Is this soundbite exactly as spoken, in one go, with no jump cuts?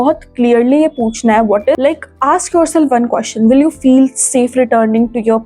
no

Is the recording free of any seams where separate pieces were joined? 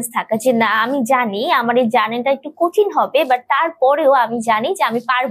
yes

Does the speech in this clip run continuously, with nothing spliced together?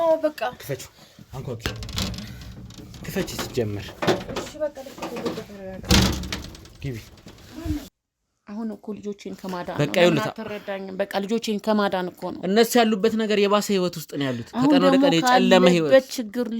no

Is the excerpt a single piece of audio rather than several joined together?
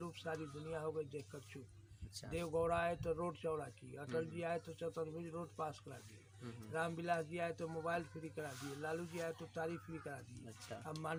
yes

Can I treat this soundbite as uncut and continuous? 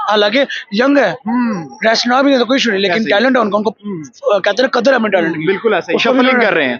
yes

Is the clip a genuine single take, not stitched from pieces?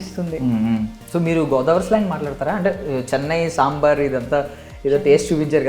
no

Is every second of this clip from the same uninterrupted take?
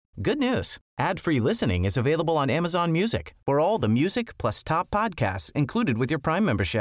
yes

